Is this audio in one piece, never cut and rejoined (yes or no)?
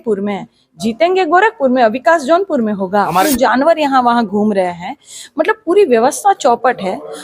no